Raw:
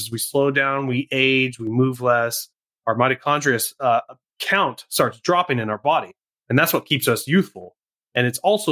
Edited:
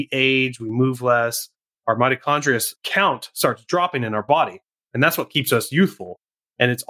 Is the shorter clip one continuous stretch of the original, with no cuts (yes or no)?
no